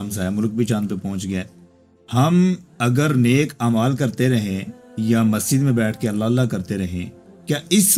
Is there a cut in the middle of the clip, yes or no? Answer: no